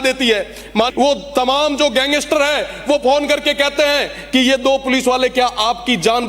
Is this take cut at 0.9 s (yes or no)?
yes